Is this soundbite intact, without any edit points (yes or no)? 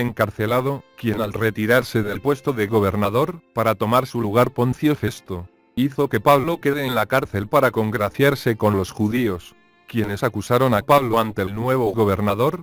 yes